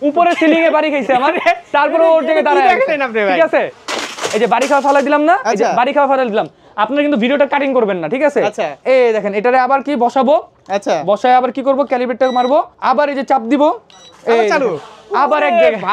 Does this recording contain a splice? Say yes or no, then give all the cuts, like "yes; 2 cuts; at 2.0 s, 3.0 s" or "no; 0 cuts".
yes; 2 cuts; at 3.8 s, 12.7 s